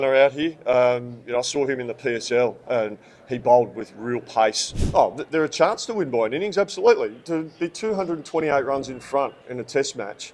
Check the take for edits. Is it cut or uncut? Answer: cut